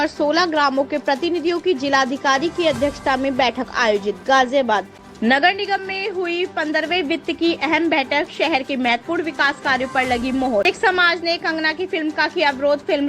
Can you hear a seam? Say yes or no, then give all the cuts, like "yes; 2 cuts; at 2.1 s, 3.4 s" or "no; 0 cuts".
yes; 2 cuts; at 5.0 s, 10.6 s